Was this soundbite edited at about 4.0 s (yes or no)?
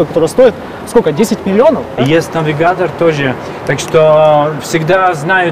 no